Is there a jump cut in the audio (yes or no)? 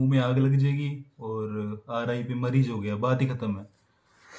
no